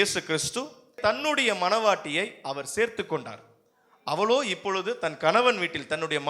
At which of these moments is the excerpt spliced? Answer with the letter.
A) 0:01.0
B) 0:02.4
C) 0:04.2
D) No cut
A